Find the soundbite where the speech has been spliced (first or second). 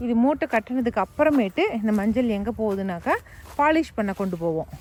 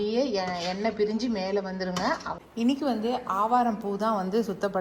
second